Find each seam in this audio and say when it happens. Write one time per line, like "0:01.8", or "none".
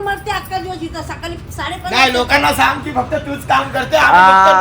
none